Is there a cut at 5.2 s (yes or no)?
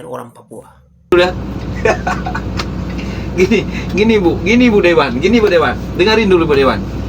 no